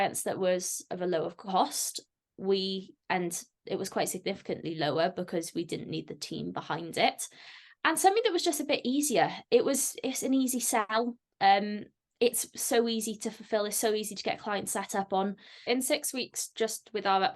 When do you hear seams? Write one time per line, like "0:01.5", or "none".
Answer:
0:15.5